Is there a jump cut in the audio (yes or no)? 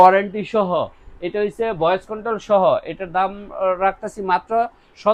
no